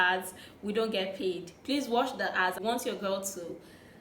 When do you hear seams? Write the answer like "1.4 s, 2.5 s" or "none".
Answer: 2.6 s